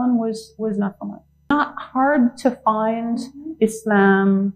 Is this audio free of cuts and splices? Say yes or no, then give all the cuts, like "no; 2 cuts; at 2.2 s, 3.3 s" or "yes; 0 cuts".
no; 1 cut; at 1.5 s